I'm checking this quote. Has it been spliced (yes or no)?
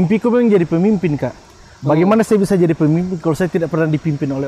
no